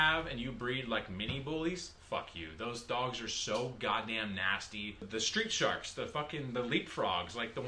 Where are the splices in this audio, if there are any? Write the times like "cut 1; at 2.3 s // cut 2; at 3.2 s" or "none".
cut 1; at 5.1 s